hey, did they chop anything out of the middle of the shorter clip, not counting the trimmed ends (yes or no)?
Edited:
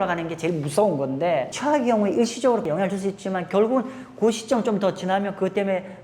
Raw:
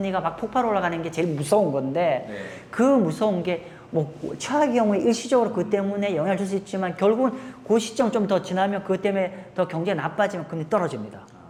yes